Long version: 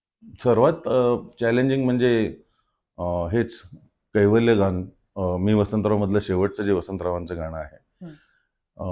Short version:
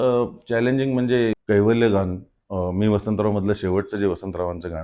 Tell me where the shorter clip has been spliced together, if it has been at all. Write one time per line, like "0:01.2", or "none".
0:01.4